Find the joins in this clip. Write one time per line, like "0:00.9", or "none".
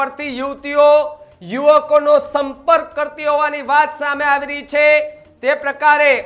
none